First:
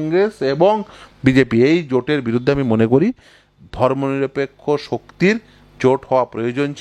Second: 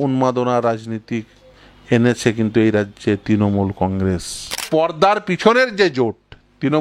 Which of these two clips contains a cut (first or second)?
second